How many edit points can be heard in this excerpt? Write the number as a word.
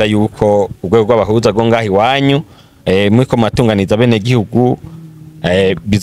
zero